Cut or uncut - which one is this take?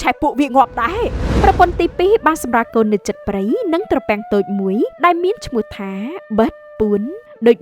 cut